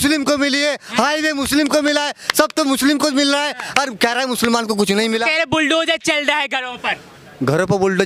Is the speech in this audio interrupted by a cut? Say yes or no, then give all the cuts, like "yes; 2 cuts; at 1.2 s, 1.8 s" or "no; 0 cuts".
no; 0 cuts